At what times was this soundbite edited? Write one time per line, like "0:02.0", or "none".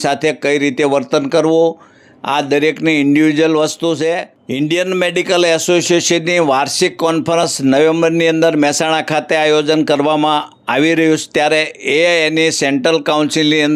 0:04.4